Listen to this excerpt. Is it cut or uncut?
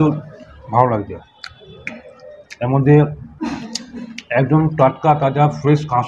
uncut